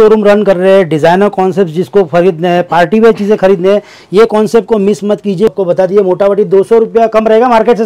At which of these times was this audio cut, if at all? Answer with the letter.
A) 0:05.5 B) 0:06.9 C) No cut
A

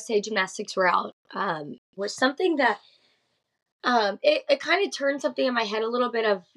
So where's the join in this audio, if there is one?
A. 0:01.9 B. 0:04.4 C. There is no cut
A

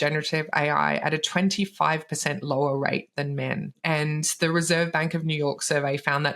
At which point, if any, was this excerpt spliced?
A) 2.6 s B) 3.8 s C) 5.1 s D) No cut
B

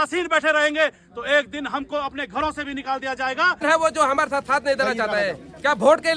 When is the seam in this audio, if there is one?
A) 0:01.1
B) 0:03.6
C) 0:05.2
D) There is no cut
B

